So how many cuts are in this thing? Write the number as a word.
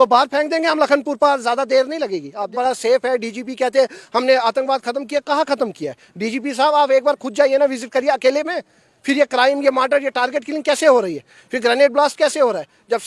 one